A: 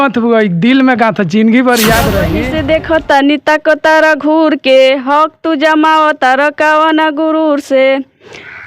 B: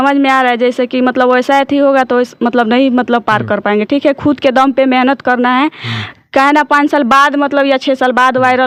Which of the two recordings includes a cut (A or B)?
A